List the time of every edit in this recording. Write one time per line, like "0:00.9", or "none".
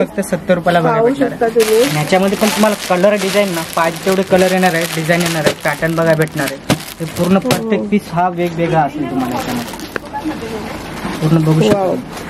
none